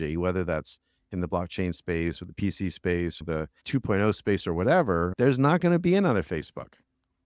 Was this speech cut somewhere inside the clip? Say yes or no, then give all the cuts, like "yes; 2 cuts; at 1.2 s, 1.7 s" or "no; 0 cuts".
yes; 2 cuts; at 3.2 s, 5.1 s